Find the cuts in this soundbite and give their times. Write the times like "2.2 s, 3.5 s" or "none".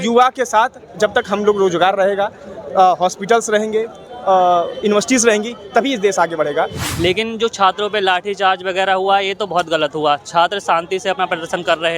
6.8 s